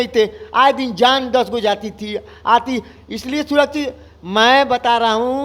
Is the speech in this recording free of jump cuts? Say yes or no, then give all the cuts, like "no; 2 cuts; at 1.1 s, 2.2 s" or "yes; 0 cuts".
yes; 0 cuts